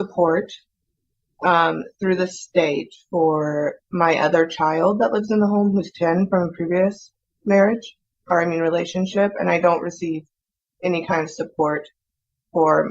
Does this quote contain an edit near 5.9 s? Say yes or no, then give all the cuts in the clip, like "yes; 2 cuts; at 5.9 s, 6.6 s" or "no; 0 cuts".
no; 0 cuts